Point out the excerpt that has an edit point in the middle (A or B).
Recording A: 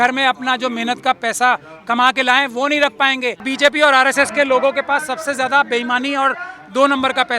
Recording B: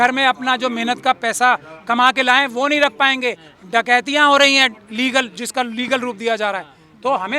A